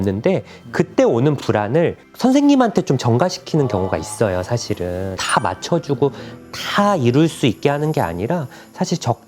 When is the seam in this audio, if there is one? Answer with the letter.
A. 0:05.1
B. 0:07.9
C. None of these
A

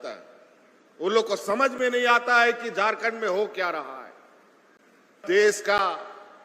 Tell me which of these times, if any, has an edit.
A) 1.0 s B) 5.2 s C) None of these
B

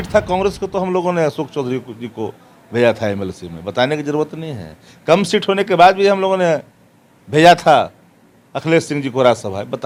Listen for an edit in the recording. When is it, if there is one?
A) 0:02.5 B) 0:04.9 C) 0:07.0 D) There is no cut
D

